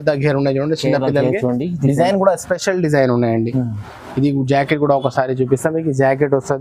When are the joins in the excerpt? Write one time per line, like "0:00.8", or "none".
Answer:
none